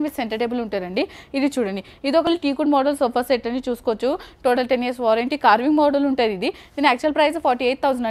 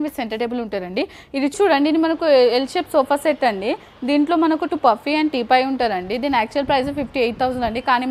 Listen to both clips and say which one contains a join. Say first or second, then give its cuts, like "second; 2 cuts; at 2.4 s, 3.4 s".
second; 1 cut; at 1.5 s